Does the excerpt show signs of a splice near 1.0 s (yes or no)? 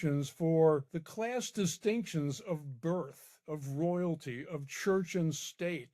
yes